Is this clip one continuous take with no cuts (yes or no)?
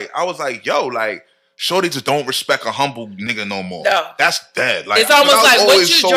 yes